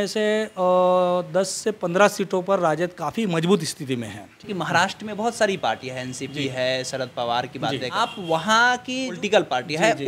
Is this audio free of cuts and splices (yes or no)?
no